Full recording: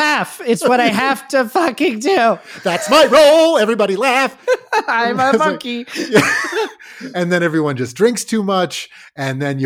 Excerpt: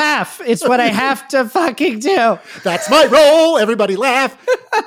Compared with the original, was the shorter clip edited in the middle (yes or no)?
no